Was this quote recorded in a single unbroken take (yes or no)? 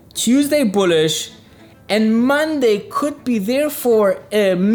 yes